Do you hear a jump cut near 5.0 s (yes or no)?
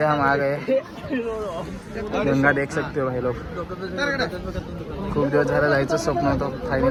no